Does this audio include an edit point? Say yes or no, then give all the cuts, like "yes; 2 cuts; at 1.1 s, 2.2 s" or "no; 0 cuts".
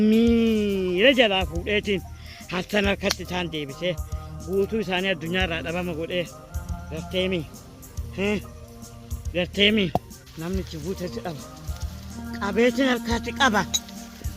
yes; 1 cut; at 10.2 s